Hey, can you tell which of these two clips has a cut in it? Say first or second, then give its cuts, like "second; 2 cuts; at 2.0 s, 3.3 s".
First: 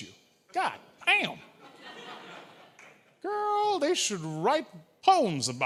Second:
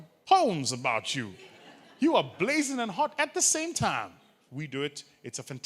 second; 1 cut; at 4.4 s